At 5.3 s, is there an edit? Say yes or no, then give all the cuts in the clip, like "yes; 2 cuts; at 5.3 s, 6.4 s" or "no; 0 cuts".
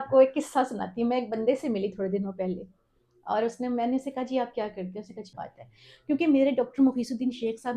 yes; 1 cut; at 5.3 s